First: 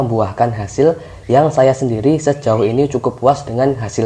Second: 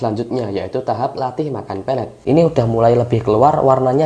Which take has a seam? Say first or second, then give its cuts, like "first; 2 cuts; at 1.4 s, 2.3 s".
second; 1 cut; at 2.1 s